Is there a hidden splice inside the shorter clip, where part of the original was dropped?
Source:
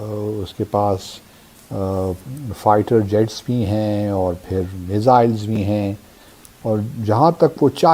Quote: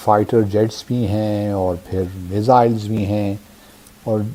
no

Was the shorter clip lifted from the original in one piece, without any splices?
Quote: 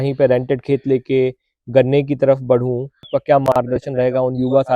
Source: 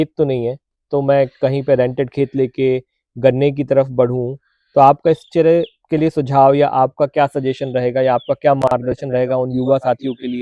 no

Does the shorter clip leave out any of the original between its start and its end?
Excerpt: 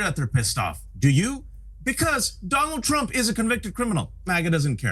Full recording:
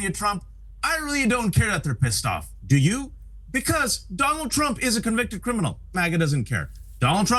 no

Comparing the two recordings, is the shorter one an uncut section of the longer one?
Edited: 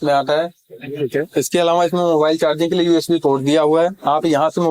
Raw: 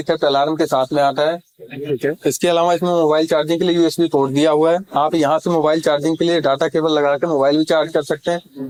yes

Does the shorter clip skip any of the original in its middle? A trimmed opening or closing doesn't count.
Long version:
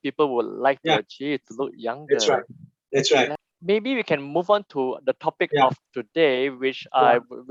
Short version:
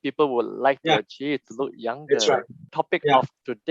yes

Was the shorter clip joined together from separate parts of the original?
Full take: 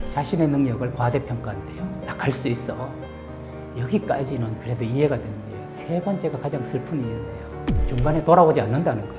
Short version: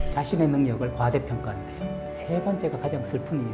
yes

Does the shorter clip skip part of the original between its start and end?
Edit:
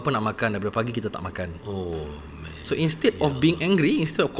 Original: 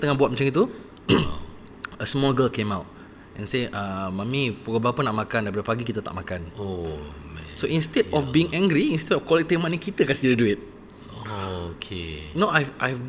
no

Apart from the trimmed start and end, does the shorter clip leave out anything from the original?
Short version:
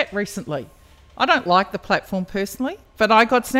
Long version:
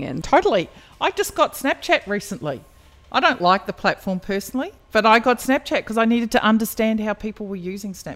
no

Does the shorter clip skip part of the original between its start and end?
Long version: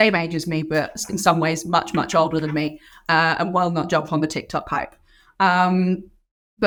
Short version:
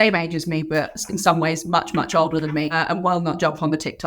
yes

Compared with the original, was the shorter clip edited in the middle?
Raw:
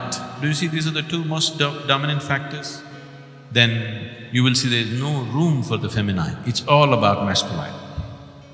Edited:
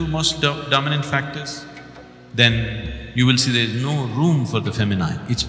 no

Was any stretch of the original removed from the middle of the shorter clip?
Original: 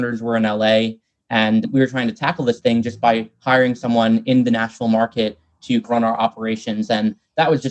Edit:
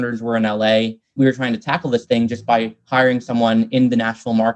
yes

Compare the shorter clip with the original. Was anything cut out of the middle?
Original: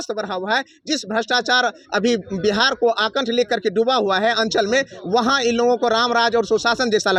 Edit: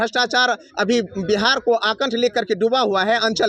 no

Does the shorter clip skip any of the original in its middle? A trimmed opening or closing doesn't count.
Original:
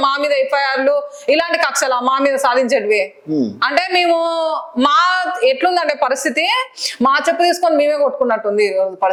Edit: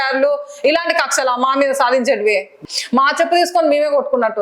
yes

